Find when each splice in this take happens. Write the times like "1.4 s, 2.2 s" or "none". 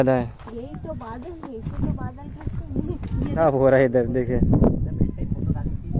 3.4 s